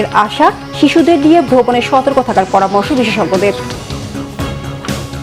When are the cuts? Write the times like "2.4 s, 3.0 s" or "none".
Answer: 3.8 s